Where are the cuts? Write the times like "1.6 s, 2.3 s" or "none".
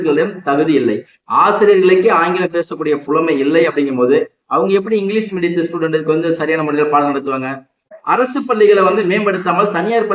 7.9 s